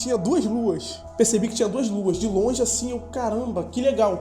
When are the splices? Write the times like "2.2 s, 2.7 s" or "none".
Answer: 1.0 s